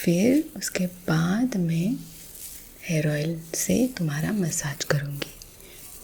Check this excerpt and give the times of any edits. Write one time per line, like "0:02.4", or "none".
none